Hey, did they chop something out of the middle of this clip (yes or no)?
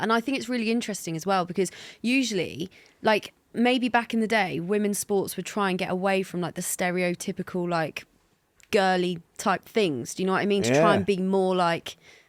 no